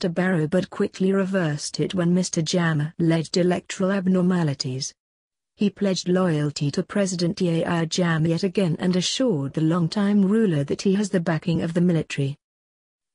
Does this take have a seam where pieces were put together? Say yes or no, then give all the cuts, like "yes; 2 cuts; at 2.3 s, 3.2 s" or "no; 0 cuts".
no; 0 cuts